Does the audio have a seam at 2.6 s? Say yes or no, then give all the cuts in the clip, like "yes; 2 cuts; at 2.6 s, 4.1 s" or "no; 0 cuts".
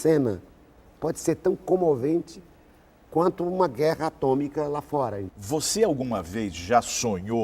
no; 1 cut; at 5.3 s